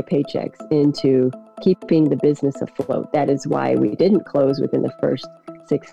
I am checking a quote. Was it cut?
no; 0 cuts

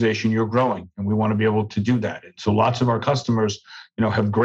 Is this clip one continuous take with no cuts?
yes; 0 cuts

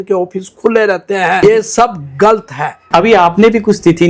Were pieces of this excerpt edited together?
yes; 2 cuts; at 1.4 s, 2.8 s

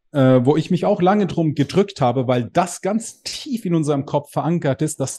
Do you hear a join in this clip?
no; 0 cuts

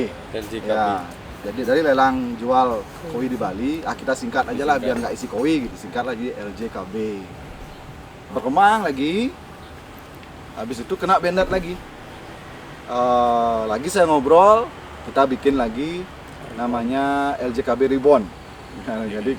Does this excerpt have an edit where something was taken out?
yes; 1 cut; at 5.8 s

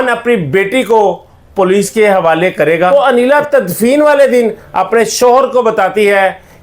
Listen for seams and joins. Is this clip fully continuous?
no; 1 cut; at 2.9 s

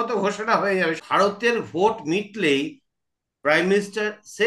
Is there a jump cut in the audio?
yes; 1 cut; at 1.0 s

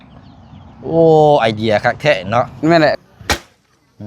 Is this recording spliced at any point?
yes; 1 cut; at 3.0 s

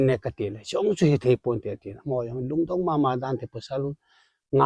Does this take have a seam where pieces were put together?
no; 0 cuts

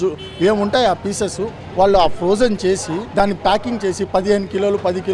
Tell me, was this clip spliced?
yes; 1 cut; at 3.0 s

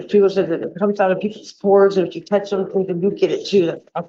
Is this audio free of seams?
yes; 0 cuts

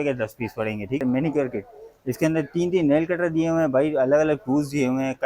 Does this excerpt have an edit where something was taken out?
yes; 1 cut; at 1.0 s

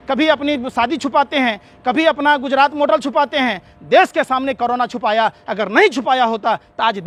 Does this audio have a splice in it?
no; 0 cuts

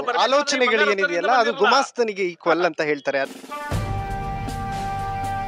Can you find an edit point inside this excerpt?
yes; 1 cut; at 3.4 s

